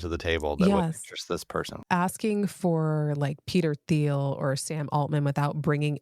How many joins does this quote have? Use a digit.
1